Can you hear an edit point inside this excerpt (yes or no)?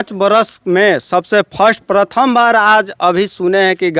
no